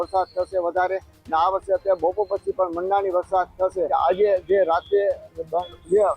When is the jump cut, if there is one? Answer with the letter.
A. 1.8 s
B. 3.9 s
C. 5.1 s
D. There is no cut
B